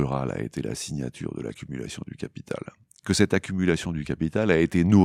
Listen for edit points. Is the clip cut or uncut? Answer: uncut